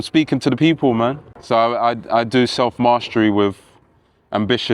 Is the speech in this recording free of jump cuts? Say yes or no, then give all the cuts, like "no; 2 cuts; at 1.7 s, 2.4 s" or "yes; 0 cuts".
no; 1 cut; at 1.3 s